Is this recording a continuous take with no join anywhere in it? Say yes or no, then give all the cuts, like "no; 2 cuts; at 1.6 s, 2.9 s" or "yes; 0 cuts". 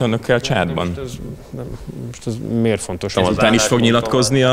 no; 1 cut; at 3.1 s